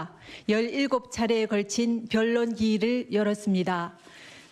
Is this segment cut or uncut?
cut